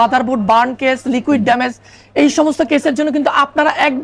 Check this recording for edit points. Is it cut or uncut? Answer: uncut